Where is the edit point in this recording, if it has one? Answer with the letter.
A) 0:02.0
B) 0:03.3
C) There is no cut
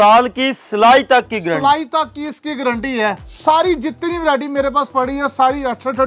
B